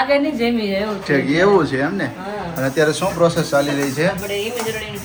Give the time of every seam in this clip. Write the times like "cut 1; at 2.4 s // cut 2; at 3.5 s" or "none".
none